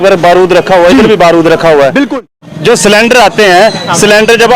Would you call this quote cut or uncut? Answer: cut